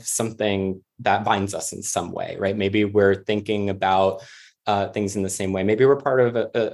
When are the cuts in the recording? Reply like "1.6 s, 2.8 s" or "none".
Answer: none